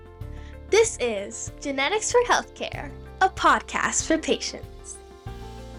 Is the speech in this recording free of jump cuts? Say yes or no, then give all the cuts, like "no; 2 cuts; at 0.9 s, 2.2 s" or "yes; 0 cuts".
yes; 0 cuts